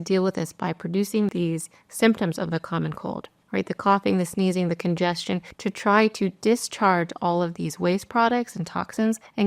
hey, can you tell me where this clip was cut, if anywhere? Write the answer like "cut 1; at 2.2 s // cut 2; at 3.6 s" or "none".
cut 1; at 1.3 s